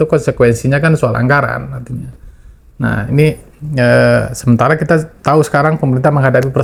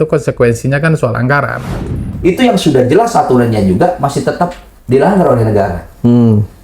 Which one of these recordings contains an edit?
second; 1 cut; at 2.0 s

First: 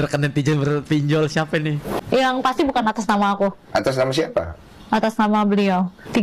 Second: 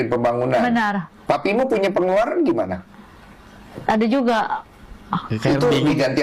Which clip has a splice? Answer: first; 1 cut; at 1.9 s

